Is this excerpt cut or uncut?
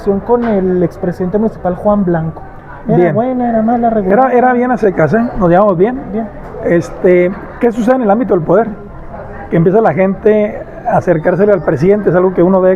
uncut